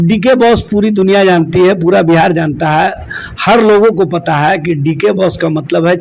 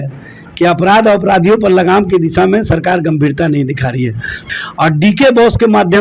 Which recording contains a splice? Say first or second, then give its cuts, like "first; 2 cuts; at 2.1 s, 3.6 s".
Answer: second; 1 cut; at 4.4 s